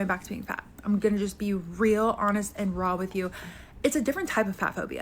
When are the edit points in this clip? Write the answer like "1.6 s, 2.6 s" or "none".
4.1 s